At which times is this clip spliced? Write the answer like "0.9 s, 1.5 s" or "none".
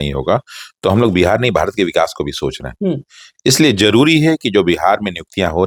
none

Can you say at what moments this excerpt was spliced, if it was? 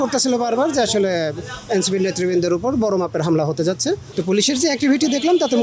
4.1 s

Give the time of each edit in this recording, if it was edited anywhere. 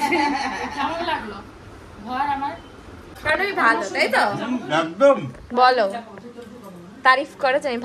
3.1 s

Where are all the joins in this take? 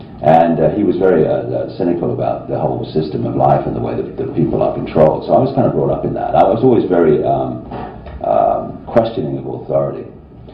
none

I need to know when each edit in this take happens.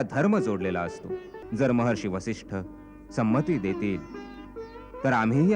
1.4 s

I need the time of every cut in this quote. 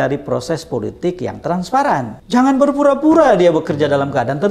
2.2 s

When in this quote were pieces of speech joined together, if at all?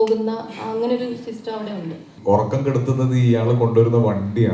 2.1 s

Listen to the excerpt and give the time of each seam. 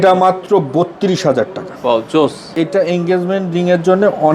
2.5 s

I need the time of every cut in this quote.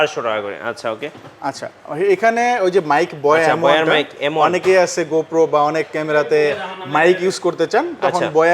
none

